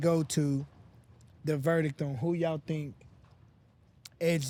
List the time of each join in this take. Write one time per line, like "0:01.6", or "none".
none